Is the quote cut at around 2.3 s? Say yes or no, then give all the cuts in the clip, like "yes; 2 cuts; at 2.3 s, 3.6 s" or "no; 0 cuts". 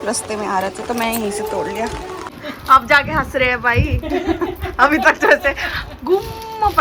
yes; 1 cut; at 2.3 s